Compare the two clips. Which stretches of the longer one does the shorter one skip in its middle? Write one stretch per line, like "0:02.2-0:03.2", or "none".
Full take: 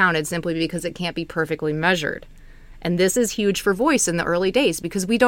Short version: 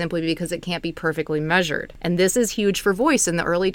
0:02.2-0:02.7